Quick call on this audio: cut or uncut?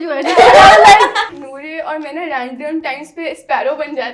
cut